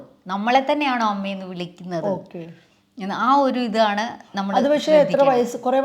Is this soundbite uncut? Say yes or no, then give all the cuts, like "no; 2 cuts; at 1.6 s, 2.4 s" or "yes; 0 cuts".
yes; 0 cuts